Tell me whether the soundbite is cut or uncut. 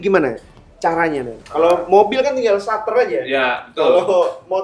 uncut